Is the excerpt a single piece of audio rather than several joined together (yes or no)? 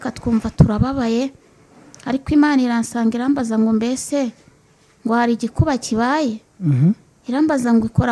yes